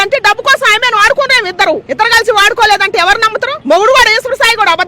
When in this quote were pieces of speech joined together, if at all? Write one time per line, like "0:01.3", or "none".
0:01.9
0:03.5